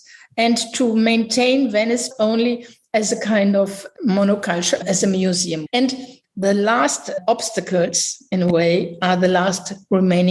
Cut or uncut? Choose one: cut